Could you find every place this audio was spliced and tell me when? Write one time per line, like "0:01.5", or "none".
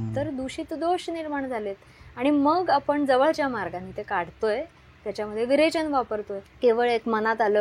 0:06.4